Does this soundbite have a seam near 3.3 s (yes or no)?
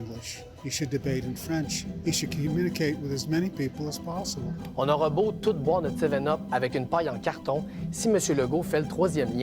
no